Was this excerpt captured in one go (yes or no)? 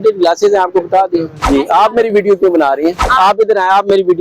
no